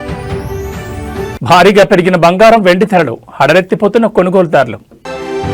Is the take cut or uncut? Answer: uncut